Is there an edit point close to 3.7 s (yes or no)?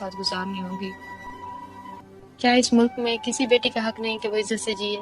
no